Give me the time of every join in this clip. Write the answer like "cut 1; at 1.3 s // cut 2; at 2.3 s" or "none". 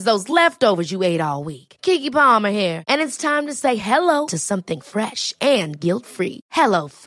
none